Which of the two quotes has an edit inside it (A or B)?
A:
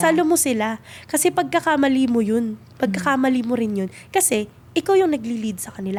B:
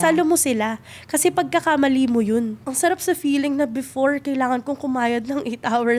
B